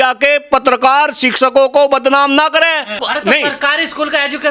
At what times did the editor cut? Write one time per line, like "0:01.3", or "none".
0:03.0